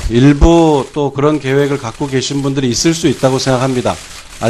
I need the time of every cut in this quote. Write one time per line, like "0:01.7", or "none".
none